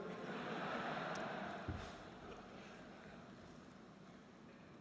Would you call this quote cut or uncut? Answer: cut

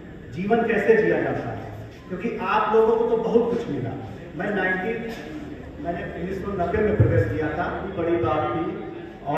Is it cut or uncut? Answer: cut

